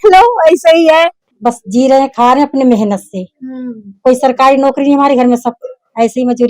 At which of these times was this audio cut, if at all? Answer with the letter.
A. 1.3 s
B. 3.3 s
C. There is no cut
A